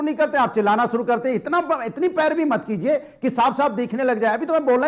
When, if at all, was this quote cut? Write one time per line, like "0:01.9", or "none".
none